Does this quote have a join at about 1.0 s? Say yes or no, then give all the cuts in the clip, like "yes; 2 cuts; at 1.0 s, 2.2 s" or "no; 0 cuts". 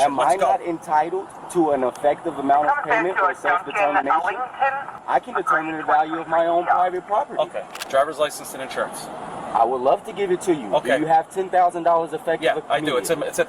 no; 2 cuts; at 5.0 s, 7.8 s